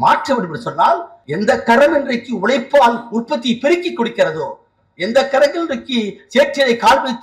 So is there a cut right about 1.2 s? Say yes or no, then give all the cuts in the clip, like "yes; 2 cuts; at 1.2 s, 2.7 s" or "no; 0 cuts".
yes; 1 cut; at 1.2 s